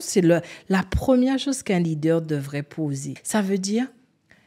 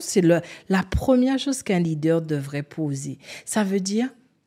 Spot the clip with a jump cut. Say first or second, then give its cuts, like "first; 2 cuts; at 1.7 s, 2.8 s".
first; 1 cut; at 3.1 s